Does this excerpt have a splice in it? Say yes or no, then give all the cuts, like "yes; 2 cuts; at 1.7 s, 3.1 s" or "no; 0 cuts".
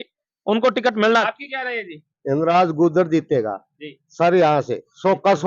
yes; 1 cut; at 1.3 s